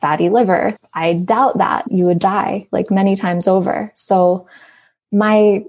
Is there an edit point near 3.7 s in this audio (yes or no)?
no